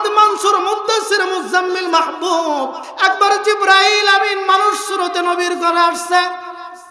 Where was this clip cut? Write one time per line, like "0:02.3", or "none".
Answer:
0:02.8